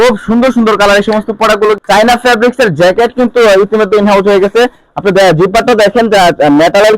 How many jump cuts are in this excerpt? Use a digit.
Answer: 1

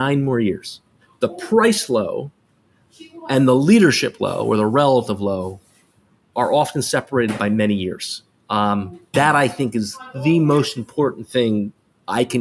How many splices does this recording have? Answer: 1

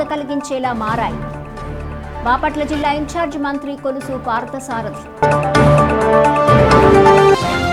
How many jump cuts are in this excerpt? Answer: 0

